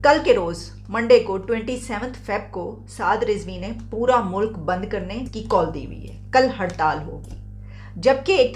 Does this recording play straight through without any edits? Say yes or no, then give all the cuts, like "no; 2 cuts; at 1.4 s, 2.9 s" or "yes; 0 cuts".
no; 1 cut; at 5.3 s